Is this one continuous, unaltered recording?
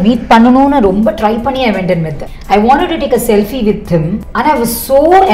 no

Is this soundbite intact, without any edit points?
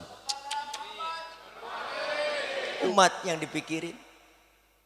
no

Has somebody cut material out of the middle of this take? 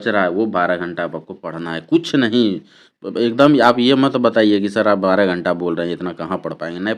no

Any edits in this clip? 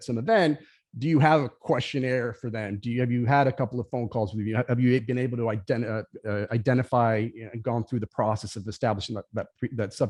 no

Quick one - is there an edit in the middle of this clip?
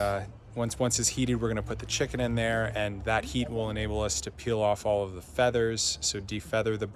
no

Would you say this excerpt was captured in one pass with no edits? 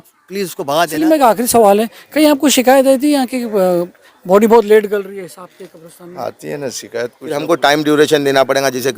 no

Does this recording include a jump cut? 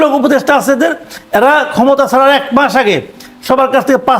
no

